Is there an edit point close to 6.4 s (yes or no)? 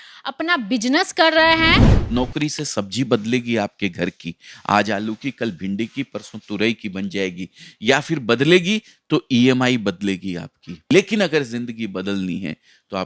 no